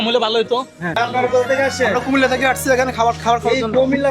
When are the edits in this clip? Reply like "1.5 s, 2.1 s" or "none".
1.0 s